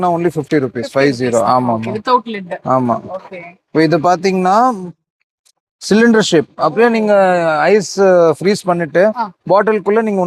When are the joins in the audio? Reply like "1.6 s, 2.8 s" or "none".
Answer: none